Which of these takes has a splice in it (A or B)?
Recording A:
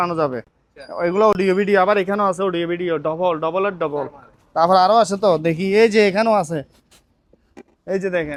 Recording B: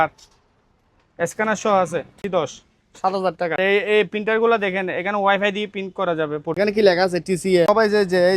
B